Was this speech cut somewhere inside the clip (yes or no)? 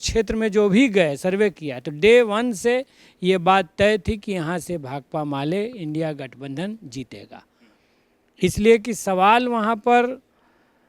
no